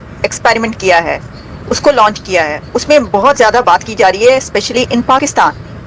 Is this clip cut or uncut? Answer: uncut